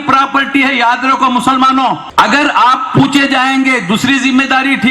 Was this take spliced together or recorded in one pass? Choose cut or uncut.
cut